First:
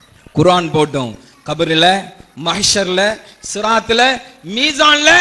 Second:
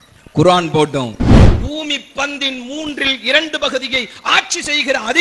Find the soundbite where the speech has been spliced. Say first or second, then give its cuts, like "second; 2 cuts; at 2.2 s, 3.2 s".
second; 1 cut; at 1.4 s